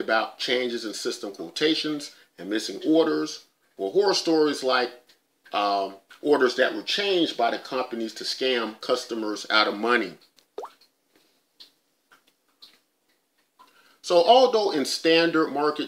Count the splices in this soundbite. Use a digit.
0